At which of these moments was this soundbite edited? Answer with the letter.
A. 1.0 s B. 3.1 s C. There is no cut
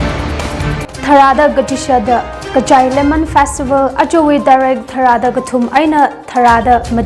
A